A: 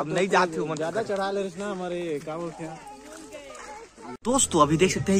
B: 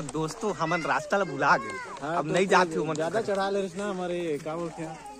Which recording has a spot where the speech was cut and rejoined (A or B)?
A